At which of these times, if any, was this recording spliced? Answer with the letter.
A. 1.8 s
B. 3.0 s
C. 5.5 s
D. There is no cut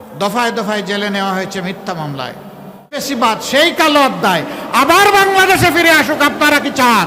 B